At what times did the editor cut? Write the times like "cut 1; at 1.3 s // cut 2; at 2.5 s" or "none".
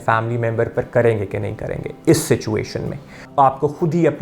cut 1; at 3.2 s